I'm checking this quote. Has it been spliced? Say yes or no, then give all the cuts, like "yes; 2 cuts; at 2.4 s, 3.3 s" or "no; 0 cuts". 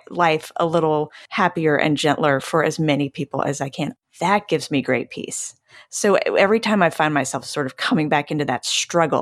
yes; 2 cuts; at 1.2 s, 3.9 s